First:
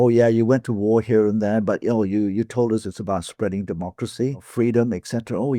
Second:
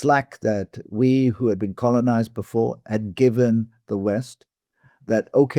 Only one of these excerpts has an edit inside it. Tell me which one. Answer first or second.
first